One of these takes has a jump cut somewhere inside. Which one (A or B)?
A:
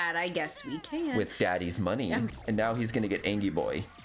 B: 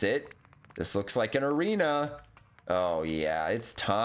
A